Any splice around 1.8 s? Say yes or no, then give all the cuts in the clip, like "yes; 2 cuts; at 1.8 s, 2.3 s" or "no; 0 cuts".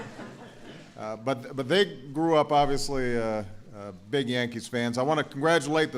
no; 1 cut; at 5.0 s